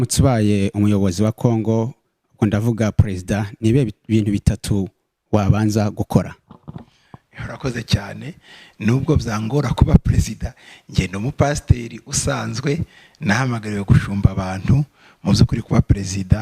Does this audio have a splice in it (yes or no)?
no